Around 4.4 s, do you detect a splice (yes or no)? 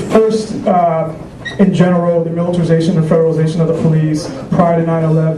no